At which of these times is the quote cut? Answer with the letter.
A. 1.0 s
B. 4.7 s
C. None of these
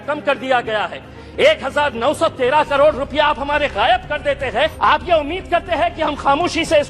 B